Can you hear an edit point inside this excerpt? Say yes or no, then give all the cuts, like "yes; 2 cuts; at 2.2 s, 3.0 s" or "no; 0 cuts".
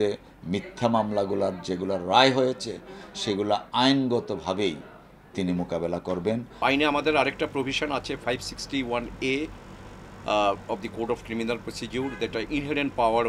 yes; 1 cut; at 6.5 s